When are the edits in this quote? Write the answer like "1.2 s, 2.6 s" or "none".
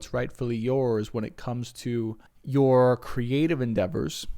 2.3 s